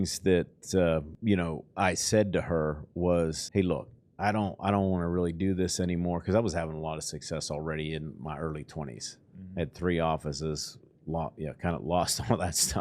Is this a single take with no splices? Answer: no; 2 cuts; at 1.1 s, 3.4 s

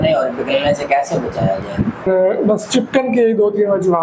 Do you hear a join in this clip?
yes; 1 cut; at 2.0 s

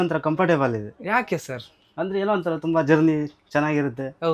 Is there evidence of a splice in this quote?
no; 0 cuts

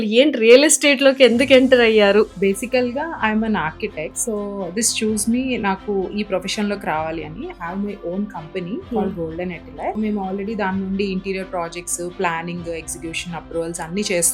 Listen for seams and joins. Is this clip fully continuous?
no; 4 cuts; at 2.3 s, 4.2 s, 8.8 s, 10.0 s

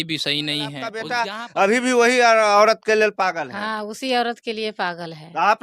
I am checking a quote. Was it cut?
yes; 1 cut; at 1.1 s

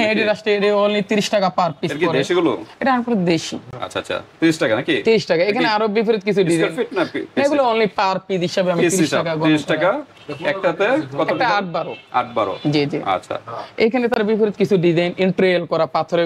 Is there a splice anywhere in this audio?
no; 0 cuts

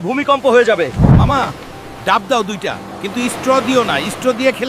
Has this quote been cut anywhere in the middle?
yes; 1 cut; at 1.0 s

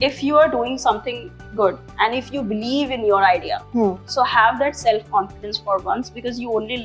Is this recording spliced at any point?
yes; 2 cuts; at 1.9 s, 4.0 s

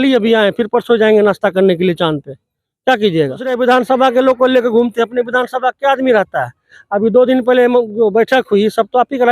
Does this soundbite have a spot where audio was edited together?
yes; 1 cut; at 3.5 s

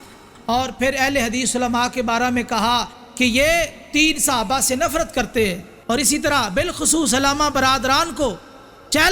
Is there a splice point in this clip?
yes; 1 cut; at 5.7 s

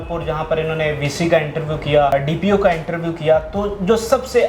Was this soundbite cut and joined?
yes; 1 cut; at 2.1 s

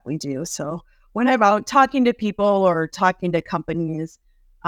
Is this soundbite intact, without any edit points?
yes; 0 cuts

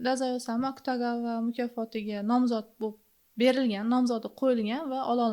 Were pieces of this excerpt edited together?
no; 0 cuts

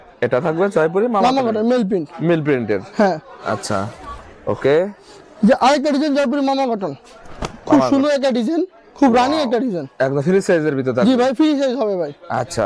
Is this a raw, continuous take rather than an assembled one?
yes; 0 cuts

